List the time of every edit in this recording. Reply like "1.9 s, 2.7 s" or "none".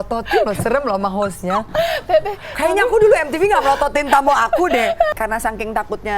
5.1 s

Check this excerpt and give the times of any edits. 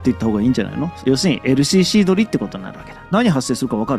0.9 s, 3.0 s

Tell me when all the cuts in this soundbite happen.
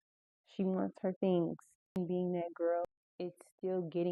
2.0 s, 2.9 s

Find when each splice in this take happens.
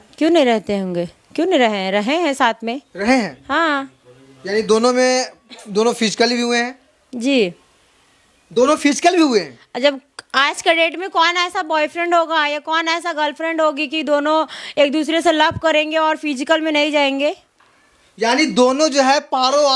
none

